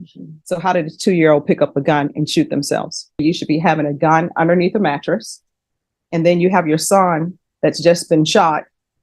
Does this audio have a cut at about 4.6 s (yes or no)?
no